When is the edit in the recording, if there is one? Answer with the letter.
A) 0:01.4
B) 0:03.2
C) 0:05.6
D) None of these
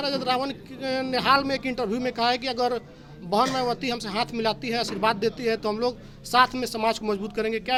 D